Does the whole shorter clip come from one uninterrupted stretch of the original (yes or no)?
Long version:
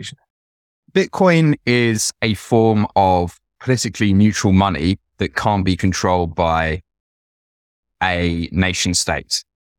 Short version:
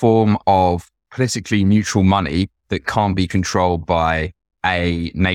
no